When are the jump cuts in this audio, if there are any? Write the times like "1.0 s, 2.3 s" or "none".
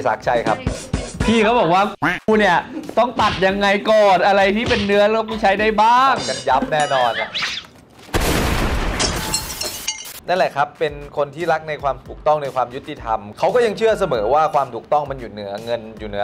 none